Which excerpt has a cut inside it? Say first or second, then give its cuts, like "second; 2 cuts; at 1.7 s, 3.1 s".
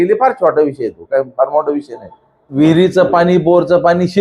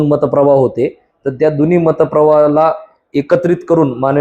first; 1 cut; at 2.5 s